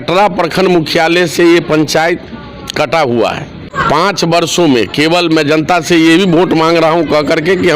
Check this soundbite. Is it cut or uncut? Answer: cut